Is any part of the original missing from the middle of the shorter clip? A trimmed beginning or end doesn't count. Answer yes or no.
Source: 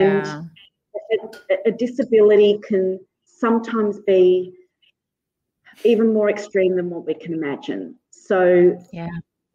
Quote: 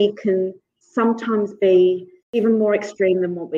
yes